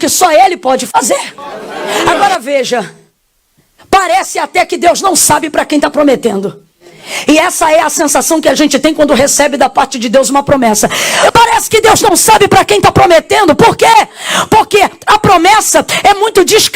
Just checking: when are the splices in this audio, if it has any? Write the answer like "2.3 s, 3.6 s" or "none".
2.1 s, 11.3 s

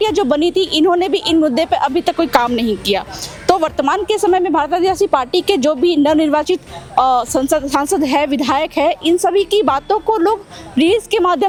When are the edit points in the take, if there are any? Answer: none

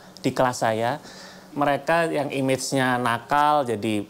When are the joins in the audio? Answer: 1.4 s

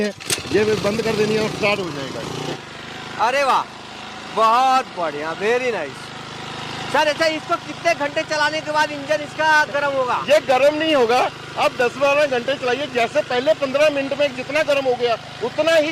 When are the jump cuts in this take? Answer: 2.6 s

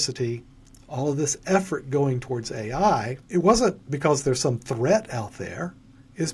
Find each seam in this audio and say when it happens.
3.2 s

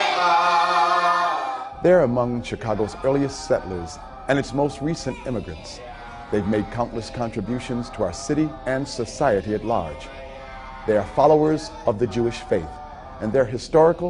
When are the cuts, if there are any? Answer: none

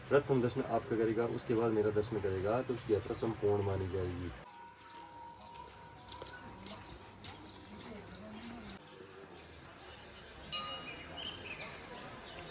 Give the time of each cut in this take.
none

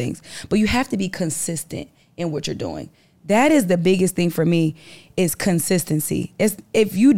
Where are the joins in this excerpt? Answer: none

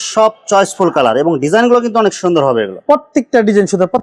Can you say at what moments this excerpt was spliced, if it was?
none

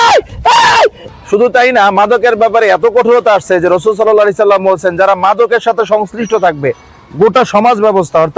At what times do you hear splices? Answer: 1.0 s

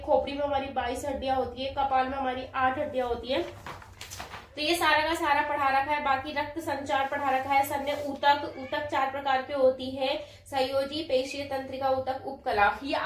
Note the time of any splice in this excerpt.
none

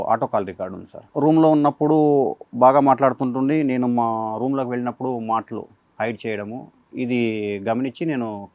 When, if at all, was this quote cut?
1.0 s

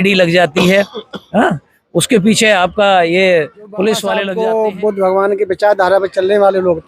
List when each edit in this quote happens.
4.3 s

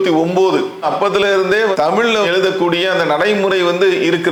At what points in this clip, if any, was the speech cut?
none

